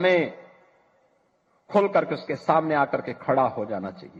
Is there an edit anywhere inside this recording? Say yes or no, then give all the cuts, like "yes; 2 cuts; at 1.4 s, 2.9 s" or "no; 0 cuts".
no; 0 cuts